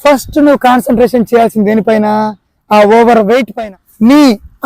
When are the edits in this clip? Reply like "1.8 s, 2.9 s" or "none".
3.5 s